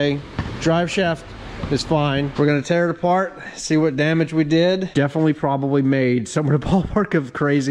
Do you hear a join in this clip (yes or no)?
yes